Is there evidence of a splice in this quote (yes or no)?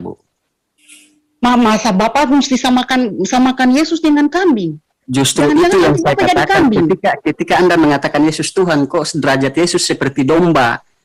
no